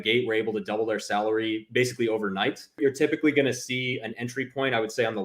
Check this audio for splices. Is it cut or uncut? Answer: cut